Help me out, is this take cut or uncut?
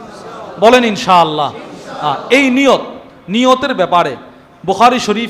uncut